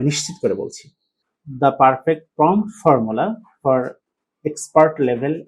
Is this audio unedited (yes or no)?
no